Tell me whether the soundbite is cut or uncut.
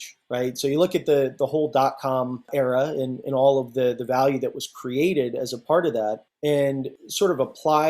cut